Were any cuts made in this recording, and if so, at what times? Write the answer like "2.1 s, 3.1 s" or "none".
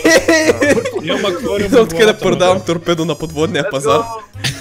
none